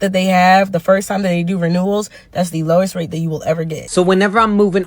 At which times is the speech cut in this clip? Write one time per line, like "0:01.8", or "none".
0:03.8